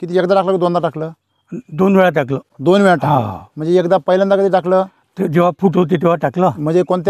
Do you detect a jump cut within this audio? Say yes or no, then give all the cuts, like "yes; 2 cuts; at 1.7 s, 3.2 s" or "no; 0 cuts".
no; 0 cuts